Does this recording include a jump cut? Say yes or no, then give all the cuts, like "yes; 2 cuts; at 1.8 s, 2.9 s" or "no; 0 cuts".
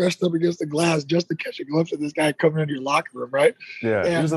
no; 0 cuts